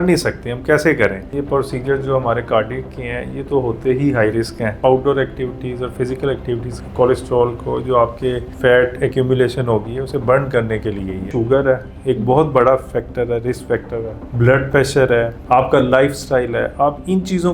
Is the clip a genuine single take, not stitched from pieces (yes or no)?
no